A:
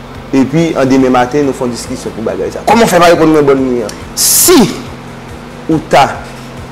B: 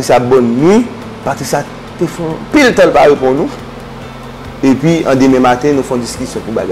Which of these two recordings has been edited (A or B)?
A